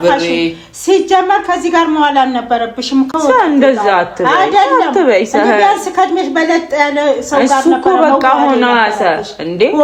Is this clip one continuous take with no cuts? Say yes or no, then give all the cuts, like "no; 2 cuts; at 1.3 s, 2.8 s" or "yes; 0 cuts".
yes; 0 cuts